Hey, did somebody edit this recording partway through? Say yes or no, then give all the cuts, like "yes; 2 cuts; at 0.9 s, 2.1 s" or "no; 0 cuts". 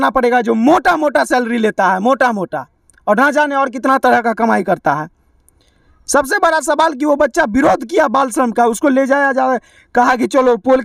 no; 0 cuts